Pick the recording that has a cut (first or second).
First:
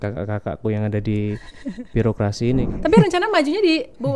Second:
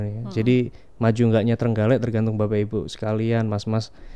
first